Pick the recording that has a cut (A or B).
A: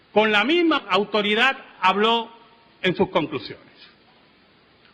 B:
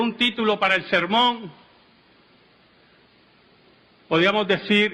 A